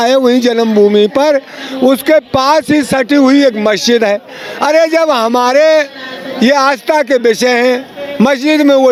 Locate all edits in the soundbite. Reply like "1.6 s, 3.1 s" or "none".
none